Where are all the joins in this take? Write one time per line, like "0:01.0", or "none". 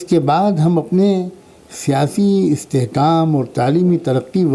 none